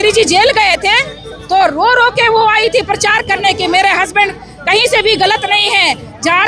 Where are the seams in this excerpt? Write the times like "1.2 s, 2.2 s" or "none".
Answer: none